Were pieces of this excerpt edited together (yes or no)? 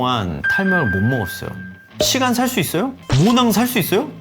yes